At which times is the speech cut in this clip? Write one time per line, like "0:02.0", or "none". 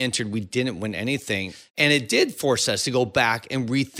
0:01.5